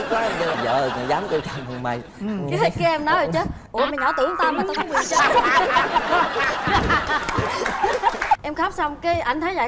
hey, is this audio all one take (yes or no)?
no